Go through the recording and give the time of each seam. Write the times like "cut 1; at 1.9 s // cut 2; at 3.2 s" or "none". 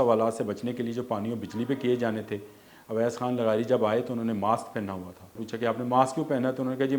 cut 1; at 5.4 s